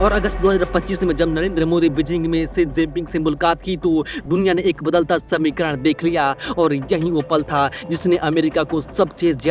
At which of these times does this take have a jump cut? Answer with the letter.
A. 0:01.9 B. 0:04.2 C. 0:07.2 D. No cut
B